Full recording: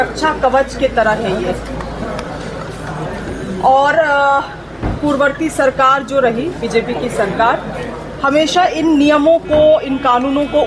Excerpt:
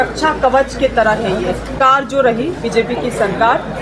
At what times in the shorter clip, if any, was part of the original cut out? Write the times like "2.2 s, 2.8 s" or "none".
1.8 s

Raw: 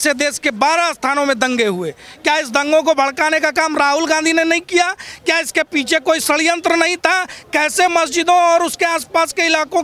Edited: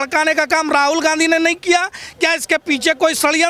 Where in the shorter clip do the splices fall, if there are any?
none

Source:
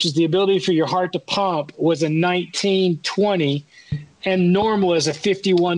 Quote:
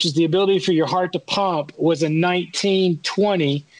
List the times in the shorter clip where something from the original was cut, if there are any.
none

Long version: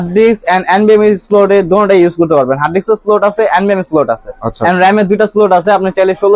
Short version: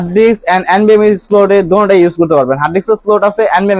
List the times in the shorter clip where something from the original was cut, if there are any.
none

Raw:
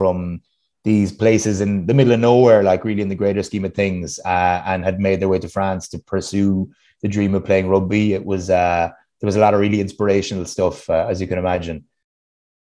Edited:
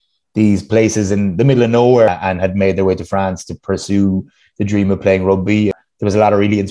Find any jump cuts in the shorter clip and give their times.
2.1 s, 5.8 s

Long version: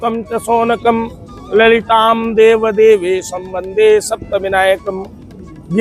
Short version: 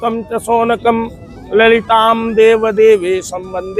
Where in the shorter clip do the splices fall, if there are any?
none

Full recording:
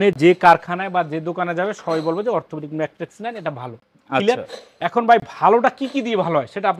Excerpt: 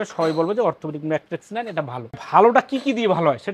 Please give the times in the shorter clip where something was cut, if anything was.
2.2 s

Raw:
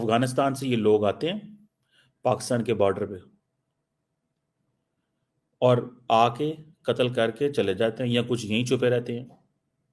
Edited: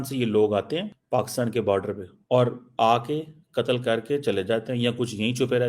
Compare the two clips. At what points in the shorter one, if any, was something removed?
0.9 s, 2.1 s

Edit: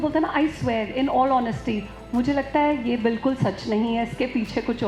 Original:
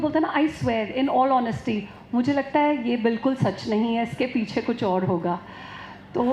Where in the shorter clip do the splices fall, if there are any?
none

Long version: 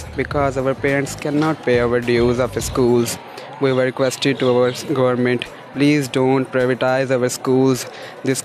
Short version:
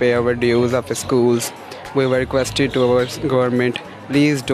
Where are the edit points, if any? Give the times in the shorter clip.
none

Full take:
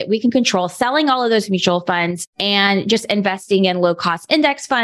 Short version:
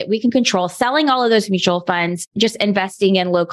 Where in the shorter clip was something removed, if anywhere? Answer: 2.3 s

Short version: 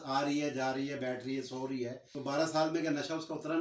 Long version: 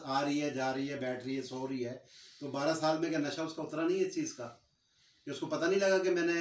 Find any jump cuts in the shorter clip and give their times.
2.1 s

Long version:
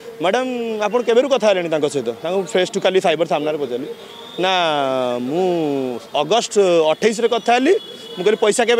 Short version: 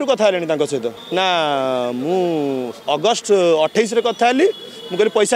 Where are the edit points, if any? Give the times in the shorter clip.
0.9 s

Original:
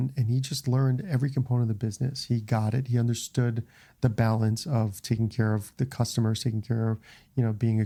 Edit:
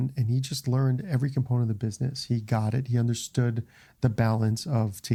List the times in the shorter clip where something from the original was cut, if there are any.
none

